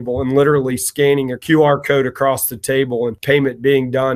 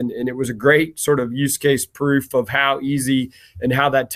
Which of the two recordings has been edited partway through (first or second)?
first